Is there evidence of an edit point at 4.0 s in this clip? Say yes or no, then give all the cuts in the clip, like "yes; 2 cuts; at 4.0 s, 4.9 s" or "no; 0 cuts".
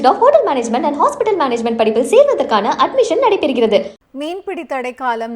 yes; 1 cut; at 4.0 s